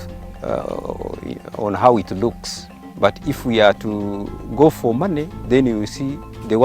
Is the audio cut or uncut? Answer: cut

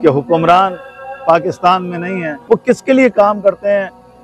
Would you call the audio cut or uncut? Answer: cut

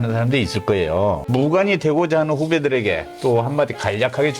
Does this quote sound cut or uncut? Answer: cut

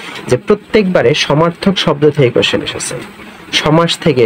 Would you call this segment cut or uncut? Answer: uncut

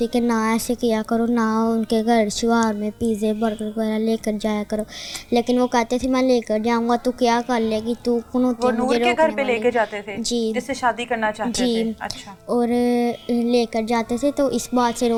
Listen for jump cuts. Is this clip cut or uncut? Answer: uncut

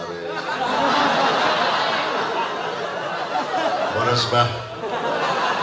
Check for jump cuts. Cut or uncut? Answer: uncut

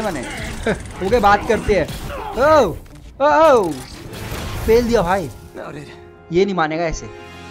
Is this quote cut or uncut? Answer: uncut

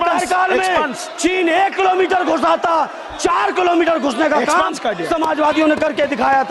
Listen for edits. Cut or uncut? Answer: uncut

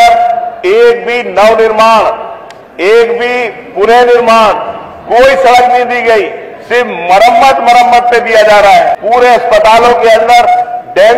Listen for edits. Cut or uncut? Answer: cut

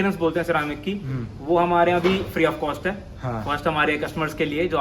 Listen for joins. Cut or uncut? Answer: uncut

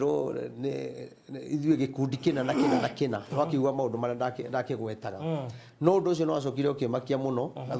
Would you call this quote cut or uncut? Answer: uncut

